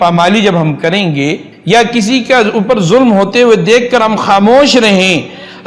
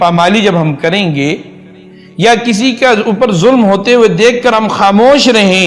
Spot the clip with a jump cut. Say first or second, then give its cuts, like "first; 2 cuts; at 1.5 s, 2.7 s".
first; 1 cut; at 1.5 s